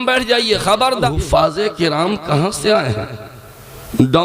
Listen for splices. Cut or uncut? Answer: cut